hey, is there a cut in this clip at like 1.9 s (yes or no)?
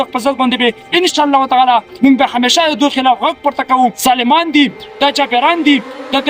yes